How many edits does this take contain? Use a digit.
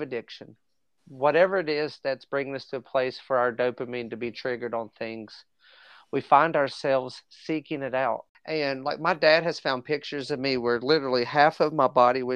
1